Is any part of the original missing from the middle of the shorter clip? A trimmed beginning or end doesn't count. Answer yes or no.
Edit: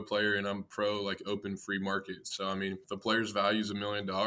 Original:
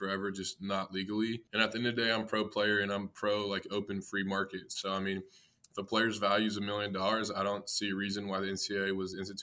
yes